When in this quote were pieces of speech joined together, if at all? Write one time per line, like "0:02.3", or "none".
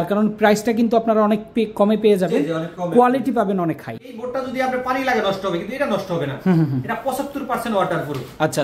0:04.2